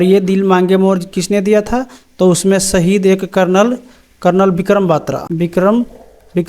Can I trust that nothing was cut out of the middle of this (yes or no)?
no